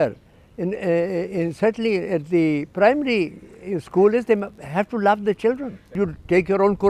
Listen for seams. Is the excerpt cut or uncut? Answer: cut